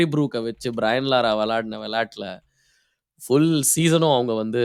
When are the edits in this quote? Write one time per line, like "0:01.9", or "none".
none